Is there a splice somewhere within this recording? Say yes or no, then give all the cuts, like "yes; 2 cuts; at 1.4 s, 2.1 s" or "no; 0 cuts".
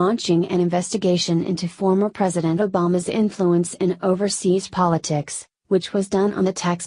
yes; 1 cut; at 2.8 s